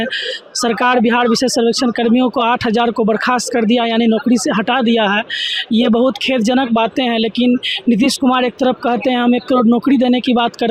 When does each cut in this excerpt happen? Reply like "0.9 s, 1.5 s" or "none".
none